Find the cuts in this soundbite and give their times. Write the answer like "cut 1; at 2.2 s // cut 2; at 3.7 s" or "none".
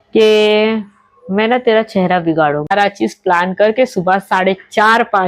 cut 1; at 2.7 s